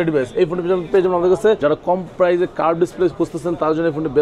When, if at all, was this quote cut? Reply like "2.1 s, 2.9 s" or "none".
1.6 s

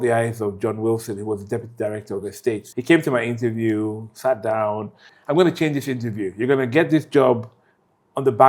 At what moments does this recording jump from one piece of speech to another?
2.7 s, 5.1 s

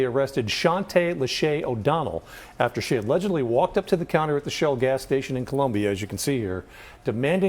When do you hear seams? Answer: none

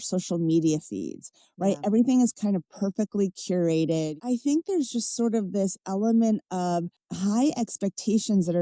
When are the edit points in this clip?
4.2 s

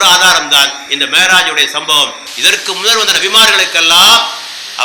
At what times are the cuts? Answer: none

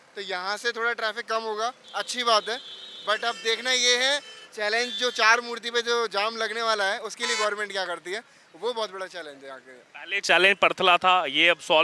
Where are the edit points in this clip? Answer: none

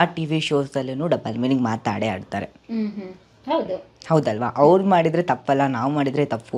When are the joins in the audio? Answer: none

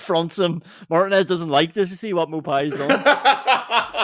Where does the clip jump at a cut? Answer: 2.9 s

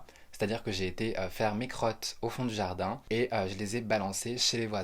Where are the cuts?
none

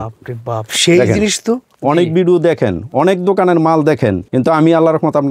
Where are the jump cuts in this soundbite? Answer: 1.7 s, 4.2 s

